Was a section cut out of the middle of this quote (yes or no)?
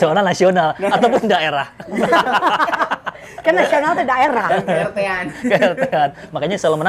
no